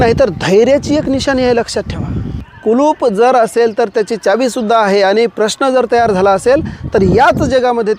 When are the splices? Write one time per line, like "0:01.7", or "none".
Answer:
0:02.4